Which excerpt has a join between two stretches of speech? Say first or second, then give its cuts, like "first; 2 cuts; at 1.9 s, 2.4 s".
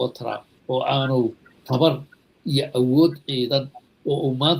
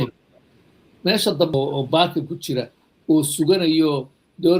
second; 1 cut; at 1.5 s